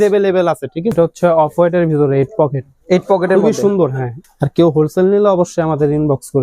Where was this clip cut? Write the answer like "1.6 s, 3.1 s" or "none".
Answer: 0.9 s, 4.1 s